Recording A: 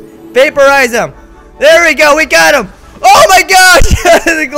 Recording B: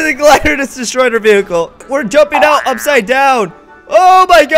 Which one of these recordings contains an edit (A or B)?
B